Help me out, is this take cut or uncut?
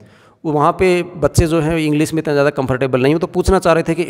uncut